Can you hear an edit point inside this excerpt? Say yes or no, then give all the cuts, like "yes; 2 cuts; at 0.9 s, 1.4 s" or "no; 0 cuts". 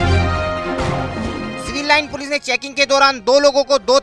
yes; 1 cut; at 1.6 s